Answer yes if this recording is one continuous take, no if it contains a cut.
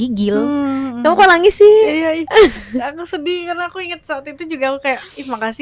yes